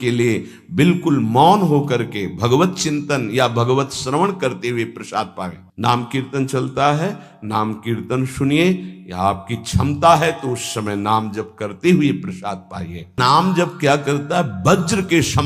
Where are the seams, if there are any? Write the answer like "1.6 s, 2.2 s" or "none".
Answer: 5.6 s, 13.2 s